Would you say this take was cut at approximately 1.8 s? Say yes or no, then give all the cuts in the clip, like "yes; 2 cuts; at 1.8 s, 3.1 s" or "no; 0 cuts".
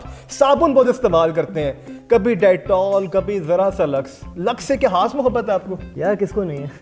no; 0 cuts